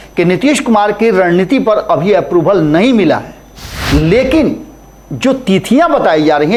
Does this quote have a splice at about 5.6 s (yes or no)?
no